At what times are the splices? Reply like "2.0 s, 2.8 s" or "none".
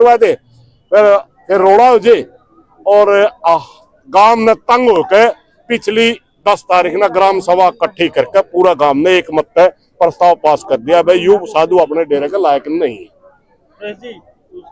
none